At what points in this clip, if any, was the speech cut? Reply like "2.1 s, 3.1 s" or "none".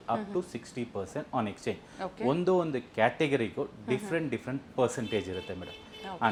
none